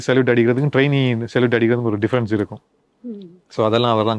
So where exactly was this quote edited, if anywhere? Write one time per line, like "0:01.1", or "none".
none